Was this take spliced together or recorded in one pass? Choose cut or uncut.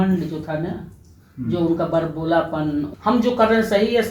cut